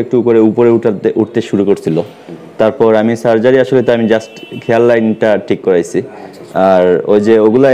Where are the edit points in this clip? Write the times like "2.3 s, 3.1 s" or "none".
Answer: none